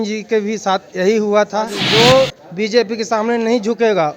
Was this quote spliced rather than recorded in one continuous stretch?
yes; 1 cut; at 1.8 s

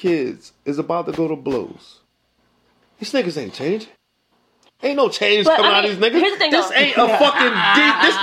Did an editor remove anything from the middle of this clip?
no; 0 cuts

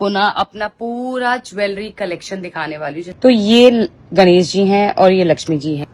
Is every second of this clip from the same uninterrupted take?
no; 1 cut; at 3.1 s

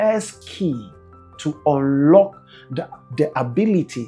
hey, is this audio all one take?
yes; 0 cuts

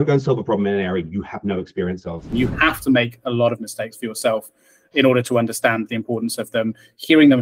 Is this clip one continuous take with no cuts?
no; 1 cut; at 2.3 s

